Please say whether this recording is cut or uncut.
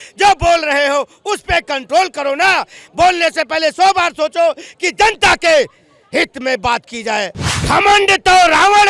cut